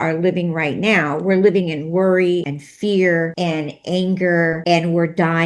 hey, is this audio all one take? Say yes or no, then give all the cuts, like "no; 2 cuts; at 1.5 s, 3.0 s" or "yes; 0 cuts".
no; 3 cuts; at 2.6 s, 3.3 s, 4.6 s